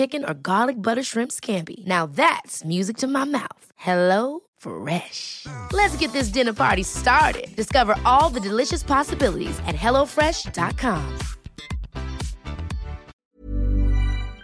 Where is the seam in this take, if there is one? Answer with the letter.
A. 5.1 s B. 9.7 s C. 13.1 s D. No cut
C